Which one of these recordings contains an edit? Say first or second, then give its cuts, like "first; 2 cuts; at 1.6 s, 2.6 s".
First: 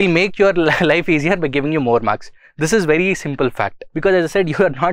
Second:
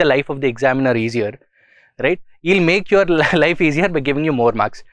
first; 1 cut; at 3.8 s